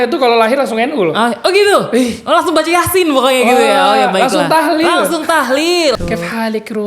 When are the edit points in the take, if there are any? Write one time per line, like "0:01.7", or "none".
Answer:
0:05.9